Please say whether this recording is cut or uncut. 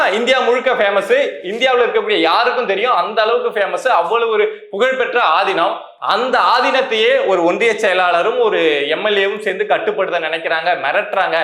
uncut